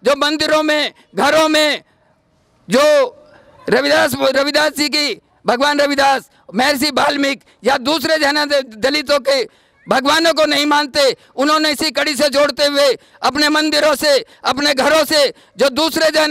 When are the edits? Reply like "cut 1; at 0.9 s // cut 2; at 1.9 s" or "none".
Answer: none

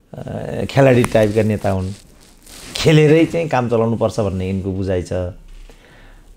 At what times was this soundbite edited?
none

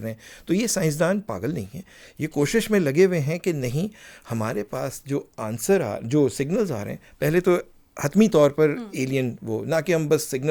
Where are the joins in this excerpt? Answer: none

